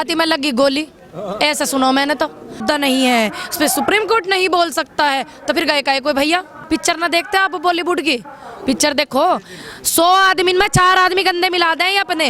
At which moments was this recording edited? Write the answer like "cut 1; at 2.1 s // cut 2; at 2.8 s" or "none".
cut 1; at 2.6 s // cut 2; at 6.6 s